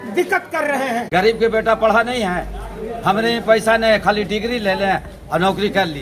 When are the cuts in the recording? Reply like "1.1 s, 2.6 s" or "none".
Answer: 1.0 s